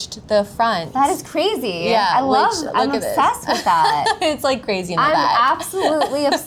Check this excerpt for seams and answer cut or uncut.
uncut